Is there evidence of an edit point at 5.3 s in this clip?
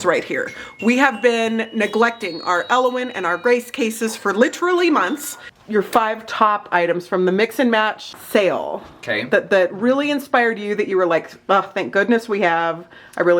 yes; 1 cut; at 5.3 s

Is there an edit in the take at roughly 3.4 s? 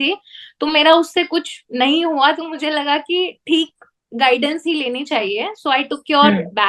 no; 0 cuts

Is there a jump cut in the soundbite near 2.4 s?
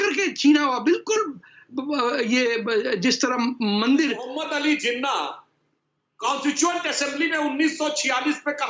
no; 1 cut; at 4.3 s

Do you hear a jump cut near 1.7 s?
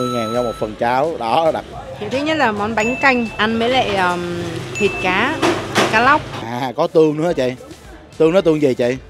yes; 2 cuts; at 1.7 s, 6.4 s

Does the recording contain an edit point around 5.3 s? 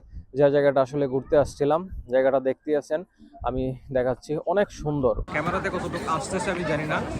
yes; 1 cut; at 5.3 s

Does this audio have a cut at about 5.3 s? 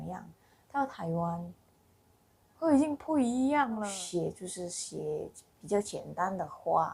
no; 1 cut; at 3.9 s

